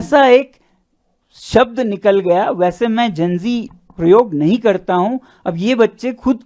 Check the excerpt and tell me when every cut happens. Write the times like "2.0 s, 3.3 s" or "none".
none